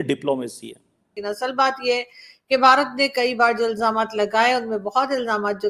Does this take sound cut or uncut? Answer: cut